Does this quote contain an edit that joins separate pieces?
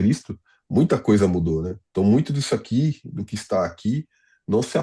no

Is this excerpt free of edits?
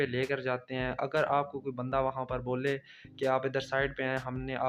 yes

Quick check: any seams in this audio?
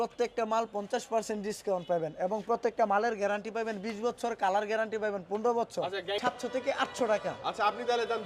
yes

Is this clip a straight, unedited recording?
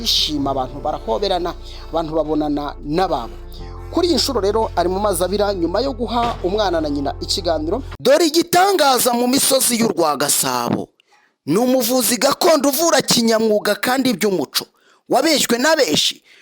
no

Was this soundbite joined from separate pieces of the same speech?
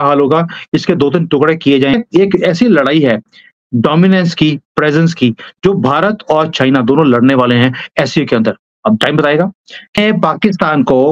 yes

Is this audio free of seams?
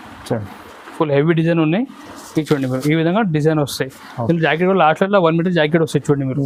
yes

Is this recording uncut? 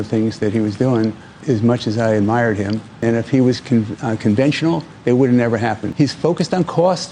no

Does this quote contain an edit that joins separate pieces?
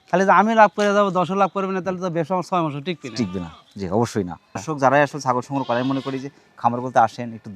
yes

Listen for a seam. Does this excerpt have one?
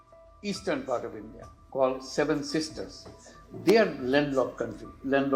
no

